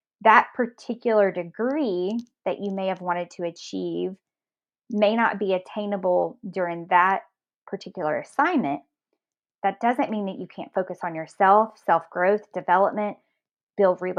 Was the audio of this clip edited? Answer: no; 0 cuts

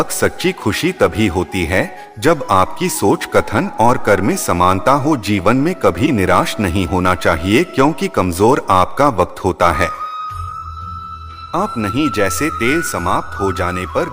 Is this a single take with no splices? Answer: no; 2 cuts; at 9.9 s, 11.2 s

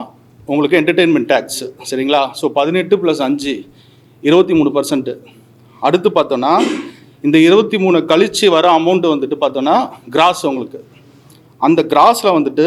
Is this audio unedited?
yes; 0 cuts

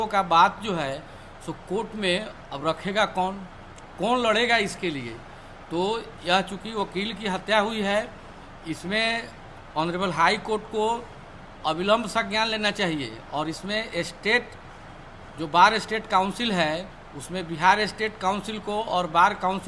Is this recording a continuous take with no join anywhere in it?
yes; 0 cuts

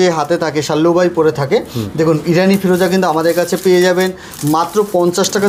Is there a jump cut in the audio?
no; 0 cuts

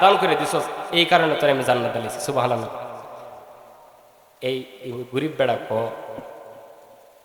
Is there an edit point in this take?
no; 0 cuts

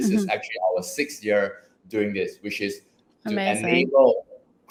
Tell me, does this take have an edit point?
no; 0 cuts

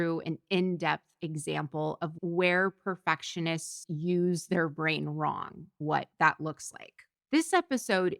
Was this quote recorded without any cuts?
no; 2 cuts; at 2.1 s, 5.7 s

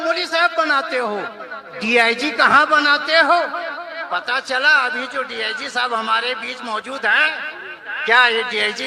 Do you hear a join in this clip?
no; 0 cuts

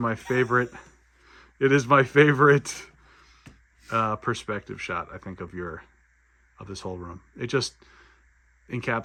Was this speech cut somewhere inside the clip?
no; 0 cuts

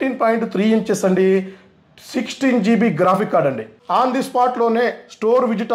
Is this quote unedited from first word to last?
no; 1 cut; at 3.8 s

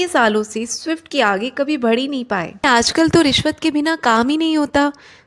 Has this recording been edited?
yes; 1 cut; at 2.6 s

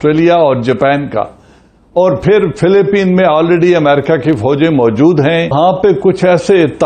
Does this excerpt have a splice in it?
yes; 1 cut; at 5.5 s

